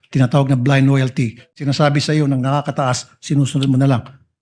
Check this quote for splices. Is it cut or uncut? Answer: cut